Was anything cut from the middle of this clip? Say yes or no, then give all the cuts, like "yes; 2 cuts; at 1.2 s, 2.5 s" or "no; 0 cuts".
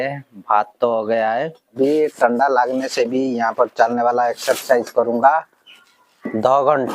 yes; 1 cut; at 1.7 s